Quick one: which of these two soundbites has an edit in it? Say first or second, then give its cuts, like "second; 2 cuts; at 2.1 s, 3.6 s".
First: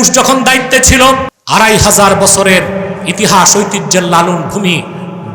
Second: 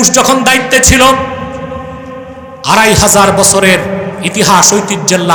first; 1 cut; at 1.3 s